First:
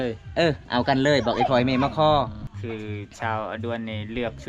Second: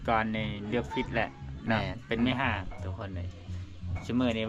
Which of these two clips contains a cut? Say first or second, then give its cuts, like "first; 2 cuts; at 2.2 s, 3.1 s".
first; 1 cut; at 2.5 s